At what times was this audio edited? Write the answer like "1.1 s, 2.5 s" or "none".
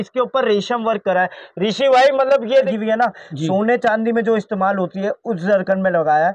2.7 s